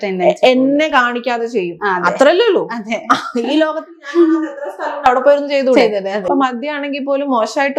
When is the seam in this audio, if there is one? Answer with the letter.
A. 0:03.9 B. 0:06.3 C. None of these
B